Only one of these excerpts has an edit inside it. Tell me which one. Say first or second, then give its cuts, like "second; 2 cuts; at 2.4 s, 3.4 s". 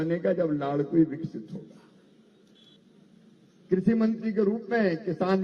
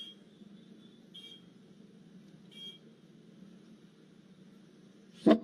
first; 1 cut; at 2.7 s